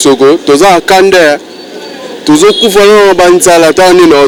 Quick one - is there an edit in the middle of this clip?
no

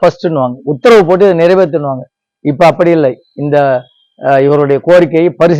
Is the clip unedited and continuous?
yes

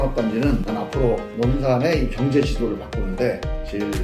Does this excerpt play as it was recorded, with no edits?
no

